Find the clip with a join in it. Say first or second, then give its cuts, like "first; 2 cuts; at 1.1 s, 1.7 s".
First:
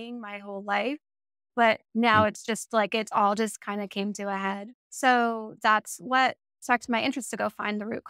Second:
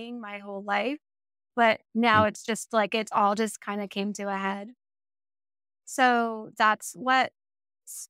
first; 2 cuts; at 4.8 s, 6.5 s